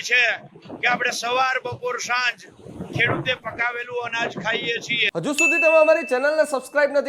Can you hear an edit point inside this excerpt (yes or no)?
yes